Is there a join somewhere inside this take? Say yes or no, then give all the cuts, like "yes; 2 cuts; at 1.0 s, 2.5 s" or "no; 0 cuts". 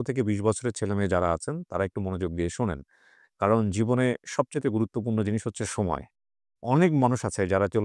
no; 0 cuts